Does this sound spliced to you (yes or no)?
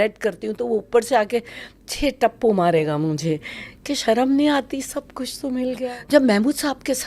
yes